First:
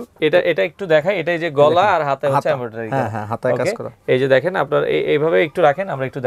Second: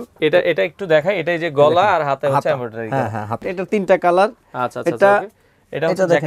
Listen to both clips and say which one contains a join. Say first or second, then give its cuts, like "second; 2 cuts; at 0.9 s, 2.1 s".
second; 1 cut; at 3.4 s